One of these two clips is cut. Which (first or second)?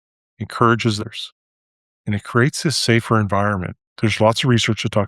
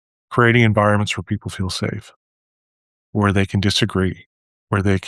first